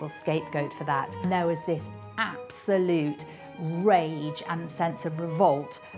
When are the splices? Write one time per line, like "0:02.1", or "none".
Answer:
0:01.1